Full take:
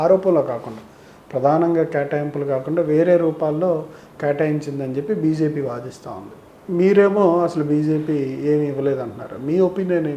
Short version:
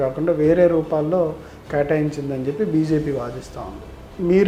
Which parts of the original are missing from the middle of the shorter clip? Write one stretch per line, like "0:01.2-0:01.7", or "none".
none